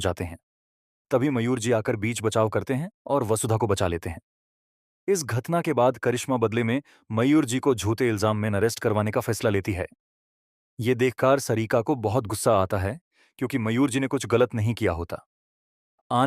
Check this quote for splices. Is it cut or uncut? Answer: cut